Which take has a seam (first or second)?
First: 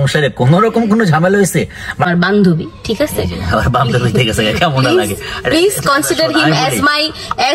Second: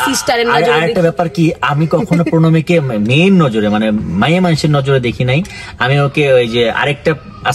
first